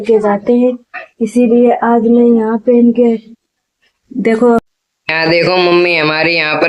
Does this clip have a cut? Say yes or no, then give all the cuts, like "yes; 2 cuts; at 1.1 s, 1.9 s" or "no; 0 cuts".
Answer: yes; 1 cut; at 4.6 s